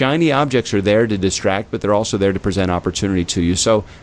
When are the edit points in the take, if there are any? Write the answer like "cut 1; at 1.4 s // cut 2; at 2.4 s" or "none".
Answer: none